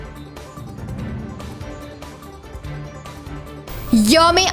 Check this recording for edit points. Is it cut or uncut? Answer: cut